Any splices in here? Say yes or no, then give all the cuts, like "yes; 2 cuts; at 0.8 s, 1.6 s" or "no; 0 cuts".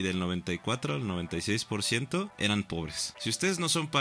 yes; 2 cuts; at 2.3 s, 3.0 s